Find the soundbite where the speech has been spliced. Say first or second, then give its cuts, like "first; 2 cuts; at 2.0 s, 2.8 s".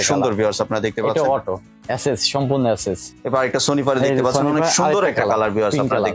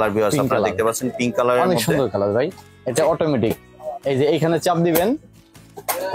first; 2 cuts; at 1.7 s, 3.1 s